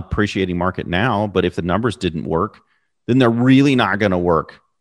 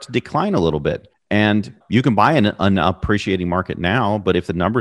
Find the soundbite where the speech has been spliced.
second; 1 cut; at 1.1 s

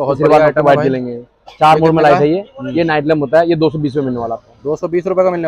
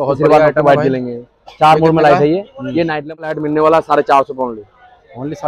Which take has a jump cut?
second; 1 cut; at 3.3 s

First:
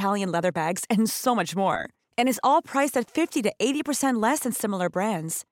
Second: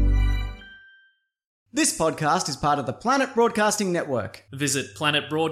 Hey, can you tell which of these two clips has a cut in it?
second; 1 cut; at 1.6 s

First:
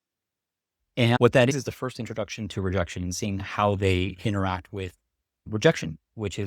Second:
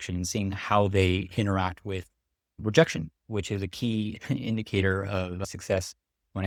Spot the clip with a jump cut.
first; 1 cut; at 1.2 s

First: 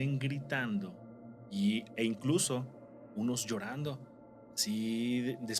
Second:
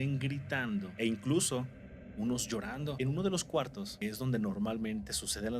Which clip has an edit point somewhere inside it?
second; 3 cuts; at 0.9 s, 2.9 s, 3.8 s

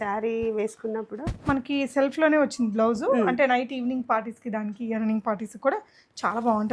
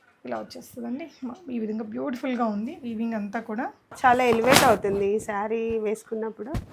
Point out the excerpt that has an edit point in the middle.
second; 1 cut; at 3.9 s

